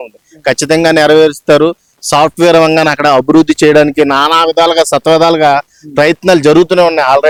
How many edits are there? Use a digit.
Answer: 0